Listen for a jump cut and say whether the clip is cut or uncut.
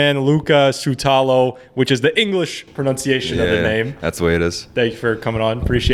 uncut